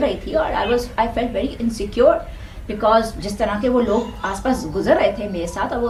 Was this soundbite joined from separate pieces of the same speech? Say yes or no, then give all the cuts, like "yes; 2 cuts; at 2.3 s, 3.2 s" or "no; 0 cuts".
no; 0 cuts